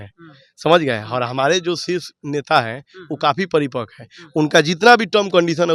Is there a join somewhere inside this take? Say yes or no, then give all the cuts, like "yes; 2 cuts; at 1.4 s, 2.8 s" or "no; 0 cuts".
no; 0 cuts